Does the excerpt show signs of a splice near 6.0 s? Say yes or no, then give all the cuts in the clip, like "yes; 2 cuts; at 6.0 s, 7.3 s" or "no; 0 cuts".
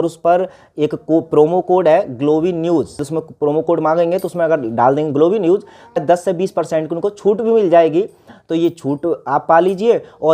yes; 2 cuts; at 3.1 s, 6.0 s